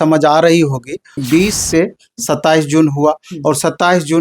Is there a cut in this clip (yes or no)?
yes